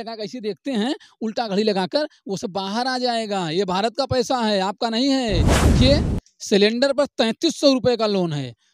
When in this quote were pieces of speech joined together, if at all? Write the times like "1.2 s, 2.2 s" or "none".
5.8 s